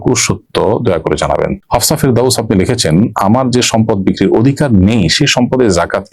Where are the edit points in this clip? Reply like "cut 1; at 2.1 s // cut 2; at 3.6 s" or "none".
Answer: cut 1; at 1.6 s